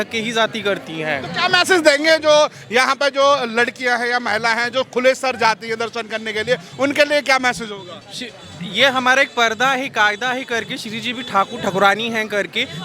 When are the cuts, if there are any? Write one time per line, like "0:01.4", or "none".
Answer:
none